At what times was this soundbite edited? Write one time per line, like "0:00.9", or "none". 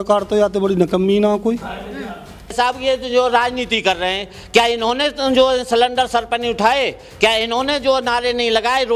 0:02.5